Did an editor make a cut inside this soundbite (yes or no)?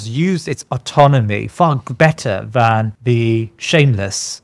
yes